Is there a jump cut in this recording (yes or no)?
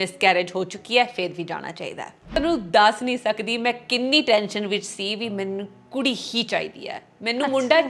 yes